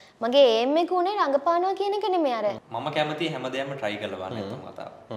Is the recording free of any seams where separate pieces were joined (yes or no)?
no